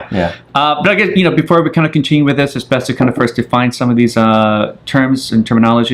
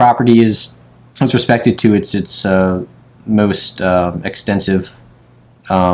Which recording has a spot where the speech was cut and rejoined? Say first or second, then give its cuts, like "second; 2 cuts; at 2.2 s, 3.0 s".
first; 1 cut; at 3.0 s